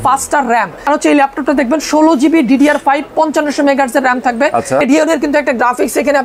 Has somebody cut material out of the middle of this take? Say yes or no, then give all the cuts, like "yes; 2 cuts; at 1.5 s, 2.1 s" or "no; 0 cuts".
yes; 2 cuts; at 0.9 s, 4.8 s